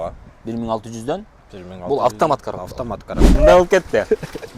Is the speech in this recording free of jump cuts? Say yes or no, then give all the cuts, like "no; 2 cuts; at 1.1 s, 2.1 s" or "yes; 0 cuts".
no; 1 cut; at 3.4 s